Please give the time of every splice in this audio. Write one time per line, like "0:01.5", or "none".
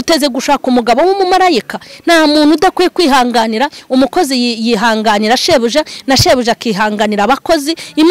none